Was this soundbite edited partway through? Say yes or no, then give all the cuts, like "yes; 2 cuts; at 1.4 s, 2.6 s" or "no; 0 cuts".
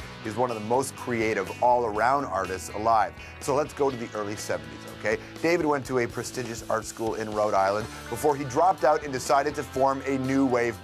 yes; 1 cut; at 6.3 s